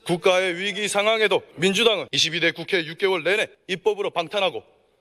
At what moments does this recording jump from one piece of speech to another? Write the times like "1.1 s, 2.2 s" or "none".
1.5 s, 2.2 s, 3.6 s

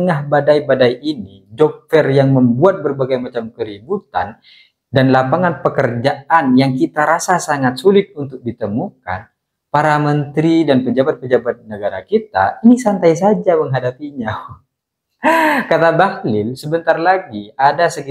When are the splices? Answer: none

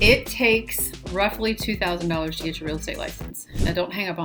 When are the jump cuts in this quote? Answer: none

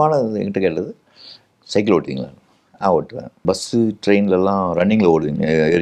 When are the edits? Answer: 3.4 s

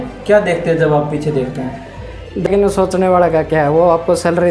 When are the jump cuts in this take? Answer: 2.5 s

